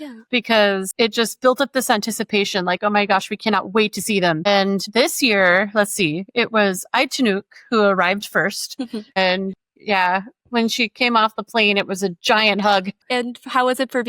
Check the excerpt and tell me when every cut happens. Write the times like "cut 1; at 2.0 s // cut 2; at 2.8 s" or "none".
cut 1; at 9.1 s // cut 2; at 13.0 s